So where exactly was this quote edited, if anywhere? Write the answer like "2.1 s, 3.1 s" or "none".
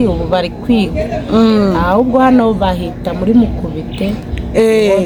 none